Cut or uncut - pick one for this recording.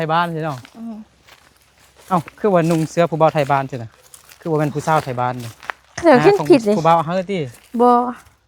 uncut